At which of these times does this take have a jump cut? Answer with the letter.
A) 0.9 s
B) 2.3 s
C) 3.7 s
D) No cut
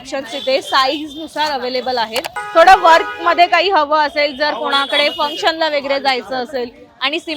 B